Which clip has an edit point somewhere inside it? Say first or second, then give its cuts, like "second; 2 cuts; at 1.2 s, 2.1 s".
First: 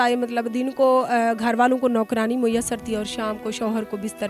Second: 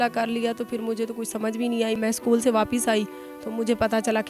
second; 1 cut; at 2.0 s